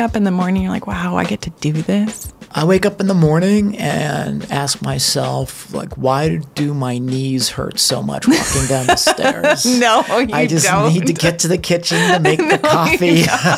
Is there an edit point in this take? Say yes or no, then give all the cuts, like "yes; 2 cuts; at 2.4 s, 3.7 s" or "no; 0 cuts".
yes; 1 cut; at 2.5 s